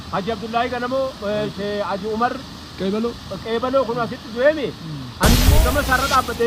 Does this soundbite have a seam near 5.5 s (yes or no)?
yes